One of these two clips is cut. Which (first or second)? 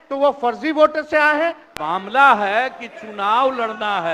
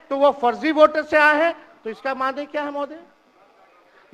first